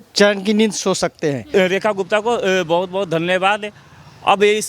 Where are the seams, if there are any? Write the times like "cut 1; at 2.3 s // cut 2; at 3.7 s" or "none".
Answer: cut 1; at 1.5 s